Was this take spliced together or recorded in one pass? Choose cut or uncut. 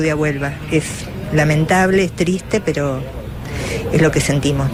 uncut